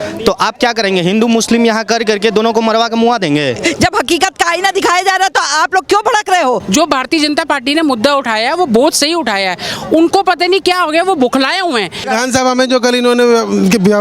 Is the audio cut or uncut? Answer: cut